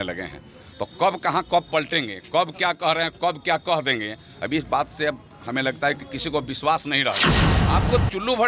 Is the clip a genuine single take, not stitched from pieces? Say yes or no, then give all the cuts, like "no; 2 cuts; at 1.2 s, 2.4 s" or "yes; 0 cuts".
no; 1 cut; at 7.5 s